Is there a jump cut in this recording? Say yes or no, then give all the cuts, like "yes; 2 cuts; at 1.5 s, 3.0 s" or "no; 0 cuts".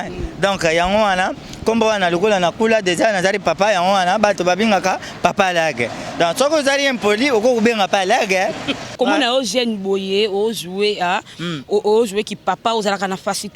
yes; 1 cut; at 8.9 s